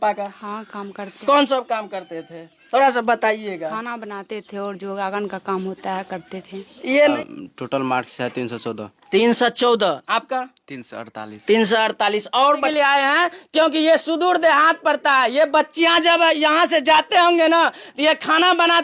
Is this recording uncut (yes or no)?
no